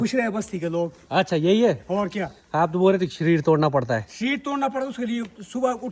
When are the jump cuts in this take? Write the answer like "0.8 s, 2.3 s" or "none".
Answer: none